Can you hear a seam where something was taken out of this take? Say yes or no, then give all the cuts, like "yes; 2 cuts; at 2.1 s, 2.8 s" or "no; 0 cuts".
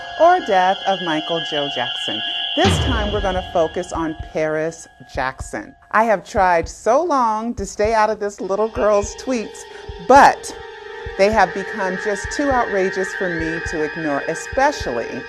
no; 0 cuts